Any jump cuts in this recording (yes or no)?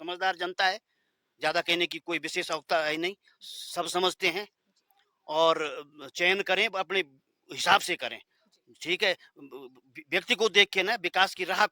no